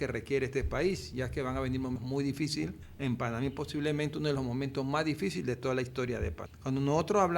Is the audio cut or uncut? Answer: cut